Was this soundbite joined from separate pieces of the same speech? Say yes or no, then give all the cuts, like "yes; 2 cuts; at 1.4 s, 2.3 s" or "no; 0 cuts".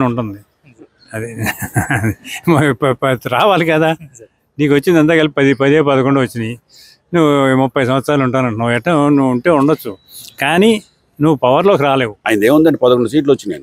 yes; 1 cut; at 12.2 s